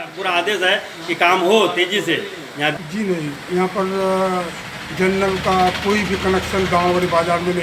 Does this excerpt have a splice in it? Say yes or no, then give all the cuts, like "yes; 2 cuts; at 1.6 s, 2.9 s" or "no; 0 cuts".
yes; 1 cut; at 2.7 s